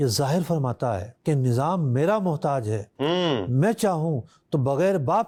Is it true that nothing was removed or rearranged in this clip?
yes; 0 cuts

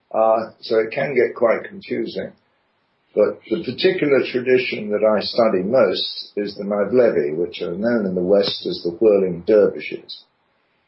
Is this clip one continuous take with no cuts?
yes; 0 cuts

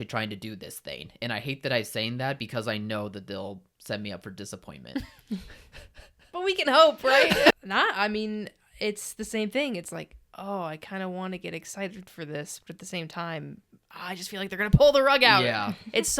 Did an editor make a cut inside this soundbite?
yes; 1 cut; at 7.6 s

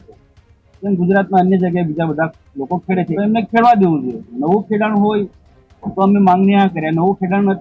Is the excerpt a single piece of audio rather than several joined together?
no; 1 cut; at 3.1 s

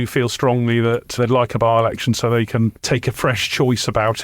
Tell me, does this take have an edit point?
yes; 1 cut; at 1.1 s

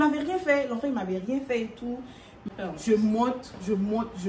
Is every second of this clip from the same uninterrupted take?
no; 1 cut; at 2.3 s

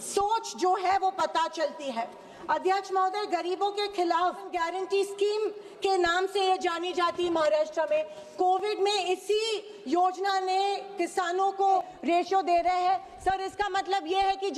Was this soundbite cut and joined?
yes; 2 cuts; at 4.5 s, 11.9 s

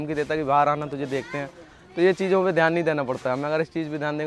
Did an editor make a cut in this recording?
no; 0 cuts

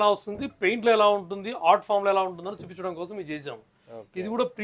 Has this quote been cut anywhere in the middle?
no; 0 cuts

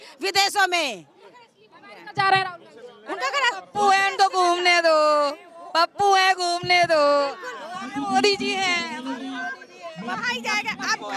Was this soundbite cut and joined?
no; 0 cuts

